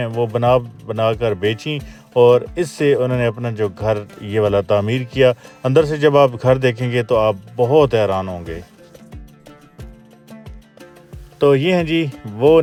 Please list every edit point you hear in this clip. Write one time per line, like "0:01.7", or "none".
none